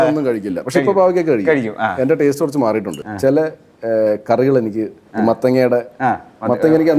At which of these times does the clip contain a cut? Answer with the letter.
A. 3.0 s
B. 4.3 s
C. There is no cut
A